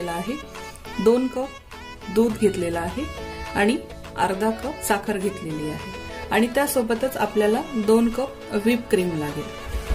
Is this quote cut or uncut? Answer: uncut